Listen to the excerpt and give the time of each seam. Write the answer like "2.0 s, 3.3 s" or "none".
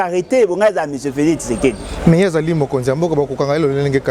none